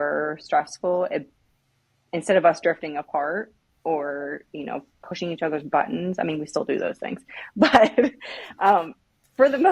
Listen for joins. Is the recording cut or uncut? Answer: uncut